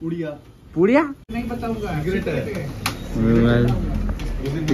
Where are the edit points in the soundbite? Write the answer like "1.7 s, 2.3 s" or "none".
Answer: 1.3 s

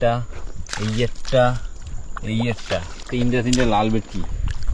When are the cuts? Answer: none

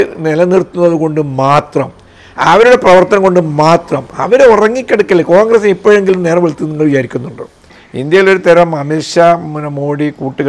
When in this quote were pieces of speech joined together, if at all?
7.8 s

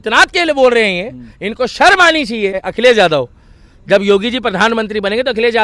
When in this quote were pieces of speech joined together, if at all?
2.6 s

